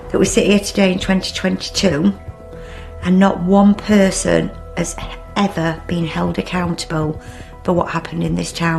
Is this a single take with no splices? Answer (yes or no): yes